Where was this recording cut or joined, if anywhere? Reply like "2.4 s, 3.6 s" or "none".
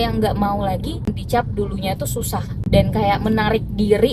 1.1 s, 2.5 s

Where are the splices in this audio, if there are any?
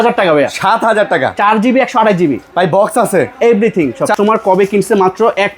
4.1 s

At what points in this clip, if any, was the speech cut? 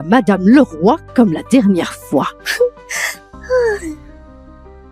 4.0 s

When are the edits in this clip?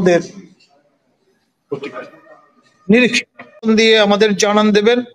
3.7 s

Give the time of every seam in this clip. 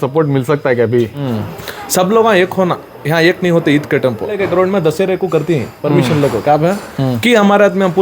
1.2 s, 4.3 s

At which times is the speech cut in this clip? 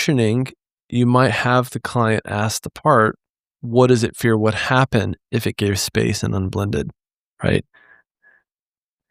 none

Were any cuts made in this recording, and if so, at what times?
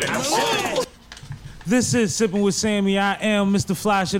1.0 s

